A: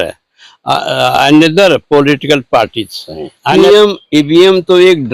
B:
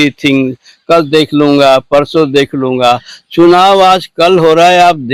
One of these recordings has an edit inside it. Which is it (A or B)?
A